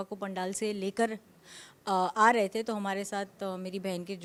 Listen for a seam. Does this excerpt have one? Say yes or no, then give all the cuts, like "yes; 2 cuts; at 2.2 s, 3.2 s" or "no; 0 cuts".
no; 0 cuts